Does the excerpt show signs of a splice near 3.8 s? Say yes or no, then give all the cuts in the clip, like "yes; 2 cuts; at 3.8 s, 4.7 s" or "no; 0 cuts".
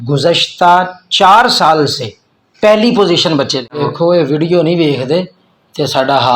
yes; 1 cut; at 3.8 s